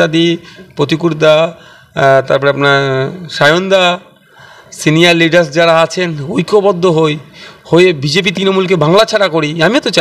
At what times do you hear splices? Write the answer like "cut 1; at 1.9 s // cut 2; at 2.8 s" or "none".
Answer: none